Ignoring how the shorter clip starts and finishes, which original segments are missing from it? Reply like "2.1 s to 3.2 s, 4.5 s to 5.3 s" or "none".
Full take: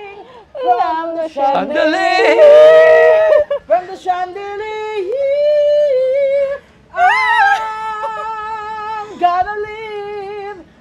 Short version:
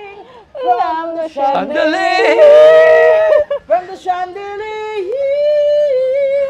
none